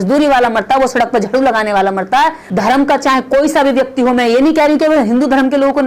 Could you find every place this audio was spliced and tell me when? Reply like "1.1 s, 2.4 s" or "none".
2.4 s